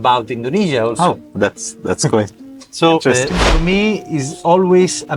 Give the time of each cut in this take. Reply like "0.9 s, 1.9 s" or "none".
3.6 s